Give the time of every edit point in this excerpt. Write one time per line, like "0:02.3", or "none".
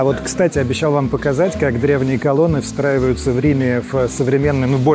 none